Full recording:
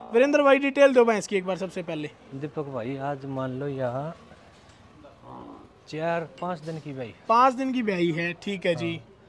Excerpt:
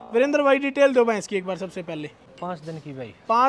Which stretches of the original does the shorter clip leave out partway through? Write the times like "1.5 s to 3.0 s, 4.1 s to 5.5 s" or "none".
2.3 s to 6.3 s